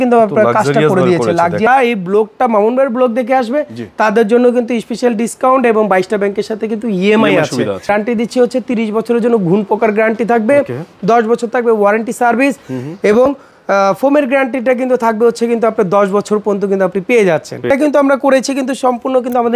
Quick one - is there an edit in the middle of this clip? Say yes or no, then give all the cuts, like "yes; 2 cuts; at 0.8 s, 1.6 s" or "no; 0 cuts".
yes; 3 cuts; at 1.7 s, 7.9 s, 17.7 s